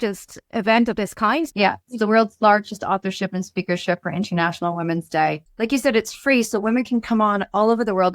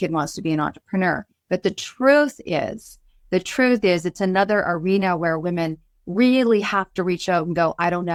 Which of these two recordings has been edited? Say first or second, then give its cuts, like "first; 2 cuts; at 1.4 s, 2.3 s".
first; 2 cuts; at 1.5 s, 5.5 s